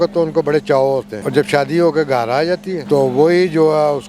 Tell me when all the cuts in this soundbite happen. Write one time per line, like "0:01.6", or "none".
0:01.2
0:02.7